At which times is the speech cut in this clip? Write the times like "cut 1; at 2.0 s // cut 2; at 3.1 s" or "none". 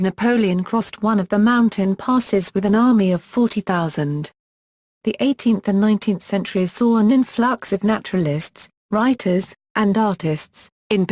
cut 1; at 4.5 s